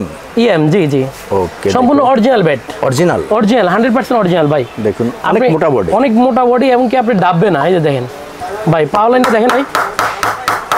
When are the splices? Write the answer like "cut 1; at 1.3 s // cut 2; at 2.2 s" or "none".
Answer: none